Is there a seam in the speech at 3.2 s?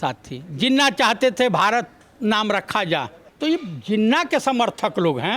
yes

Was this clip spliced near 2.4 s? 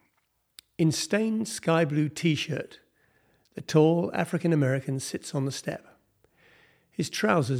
no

